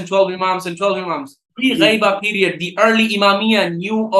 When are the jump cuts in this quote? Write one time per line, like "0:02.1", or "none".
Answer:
0:01.5

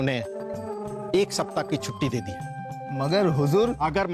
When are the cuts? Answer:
none

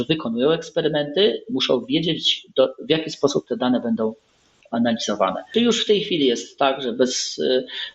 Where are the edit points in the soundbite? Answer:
0:05.5

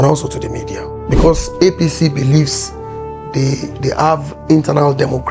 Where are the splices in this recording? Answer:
0:01.0

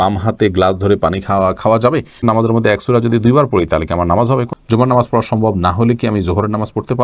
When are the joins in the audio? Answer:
0:02.2
0:04.5

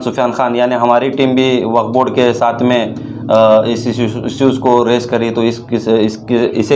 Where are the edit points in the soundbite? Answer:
none

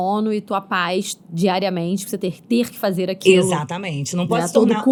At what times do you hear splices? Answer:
none

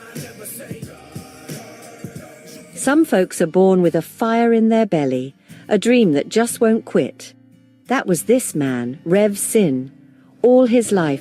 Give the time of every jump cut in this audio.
0:04.1
0:08.5

